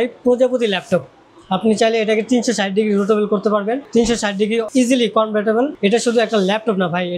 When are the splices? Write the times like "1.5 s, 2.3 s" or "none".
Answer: none